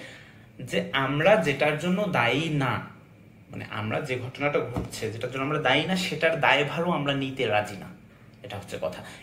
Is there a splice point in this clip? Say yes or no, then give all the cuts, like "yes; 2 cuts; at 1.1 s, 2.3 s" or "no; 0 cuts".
no; 0 cuts